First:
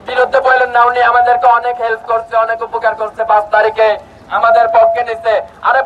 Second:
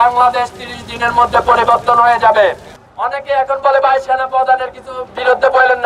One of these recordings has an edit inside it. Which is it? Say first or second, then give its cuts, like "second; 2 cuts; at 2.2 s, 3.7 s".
second; 1 cut; at 2.7 s